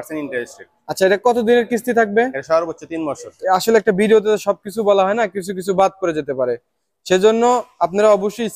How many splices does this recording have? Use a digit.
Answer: 1